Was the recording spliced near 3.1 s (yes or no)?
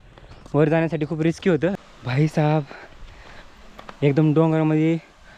no